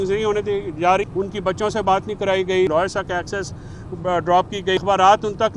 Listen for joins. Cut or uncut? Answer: cut